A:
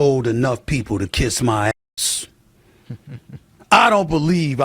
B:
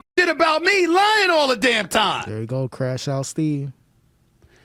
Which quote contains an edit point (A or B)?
A